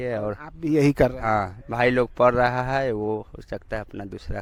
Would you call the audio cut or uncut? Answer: uncut